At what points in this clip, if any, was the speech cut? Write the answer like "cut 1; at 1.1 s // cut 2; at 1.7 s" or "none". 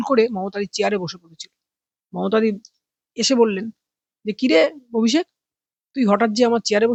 none